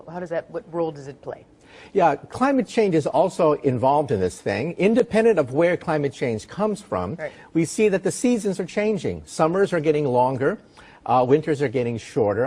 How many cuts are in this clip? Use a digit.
1